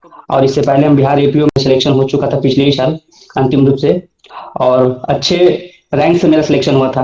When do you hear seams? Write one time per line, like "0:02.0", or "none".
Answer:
none